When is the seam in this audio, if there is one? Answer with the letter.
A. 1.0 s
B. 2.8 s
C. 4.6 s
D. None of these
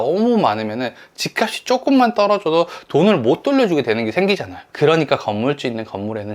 C